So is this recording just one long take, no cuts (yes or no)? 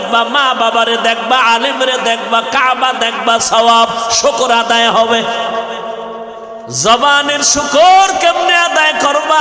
no